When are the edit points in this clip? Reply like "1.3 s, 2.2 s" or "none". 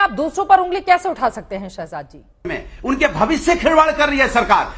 2.6 s